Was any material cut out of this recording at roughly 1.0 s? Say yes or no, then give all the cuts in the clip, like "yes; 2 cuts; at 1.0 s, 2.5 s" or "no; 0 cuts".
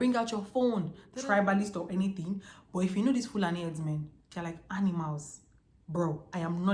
yes; 1 cut; at 1.0 s